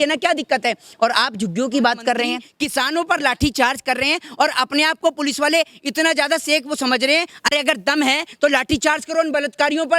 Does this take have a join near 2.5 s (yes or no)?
yes